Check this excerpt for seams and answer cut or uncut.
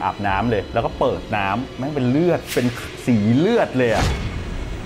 uncut